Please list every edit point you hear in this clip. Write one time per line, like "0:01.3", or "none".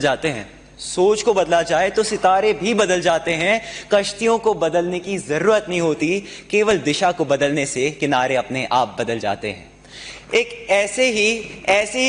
none